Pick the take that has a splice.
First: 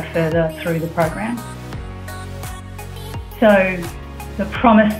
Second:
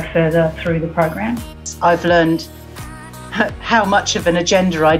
second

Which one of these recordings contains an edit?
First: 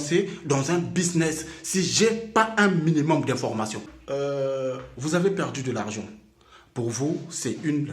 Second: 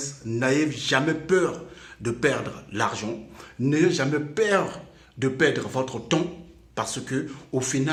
first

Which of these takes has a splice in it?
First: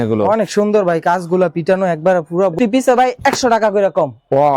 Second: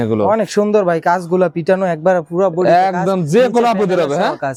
first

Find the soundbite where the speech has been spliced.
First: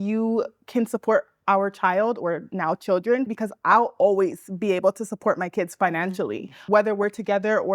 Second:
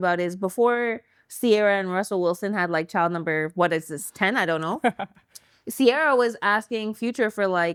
first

